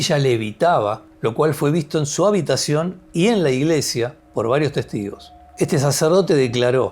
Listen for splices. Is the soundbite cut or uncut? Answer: cut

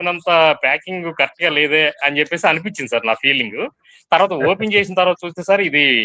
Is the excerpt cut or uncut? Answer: uncut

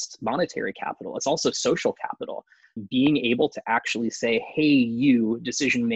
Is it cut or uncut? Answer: cut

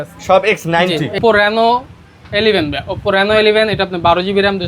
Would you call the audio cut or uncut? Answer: cut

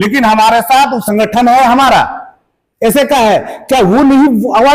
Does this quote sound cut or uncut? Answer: cut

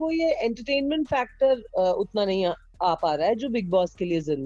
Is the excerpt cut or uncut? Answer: uncut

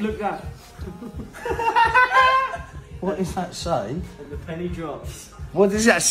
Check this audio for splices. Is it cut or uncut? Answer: uncut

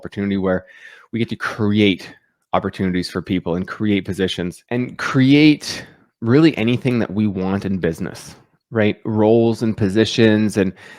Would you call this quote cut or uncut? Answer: uncut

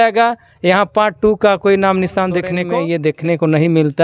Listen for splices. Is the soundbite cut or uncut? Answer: cut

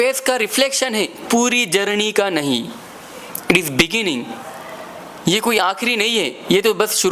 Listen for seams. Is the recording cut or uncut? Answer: cut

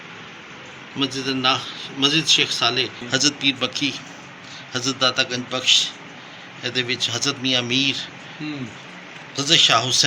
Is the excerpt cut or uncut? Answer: cut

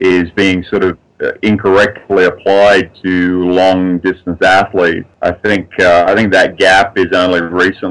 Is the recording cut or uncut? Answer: cut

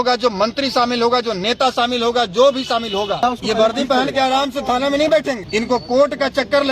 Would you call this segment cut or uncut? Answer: cut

